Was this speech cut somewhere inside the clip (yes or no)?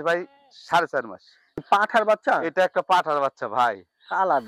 yes